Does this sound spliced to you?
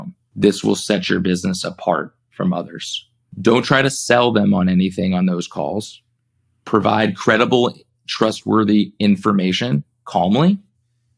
no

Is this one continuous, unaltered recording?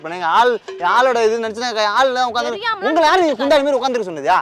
yes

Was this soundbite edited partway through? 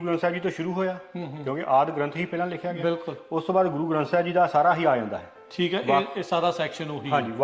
no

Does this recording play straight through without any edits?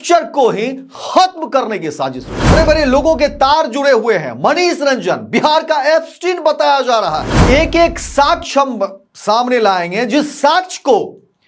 no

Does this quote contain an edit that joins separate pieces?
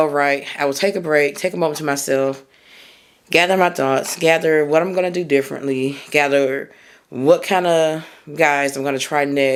no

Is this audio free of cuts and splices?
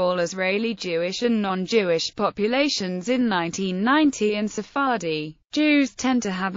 no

